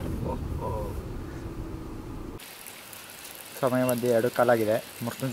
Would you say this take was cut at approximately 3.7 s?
no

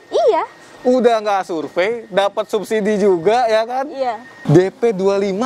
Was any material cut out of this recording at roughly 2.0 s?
no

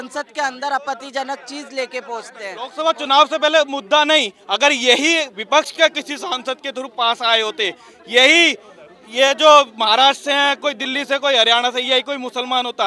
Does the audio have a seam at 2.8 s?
yes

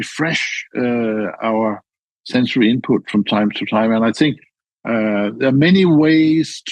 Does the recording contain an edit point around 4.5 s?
yes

